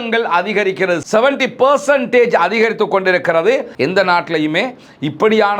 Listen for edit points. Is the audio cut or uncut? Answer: cut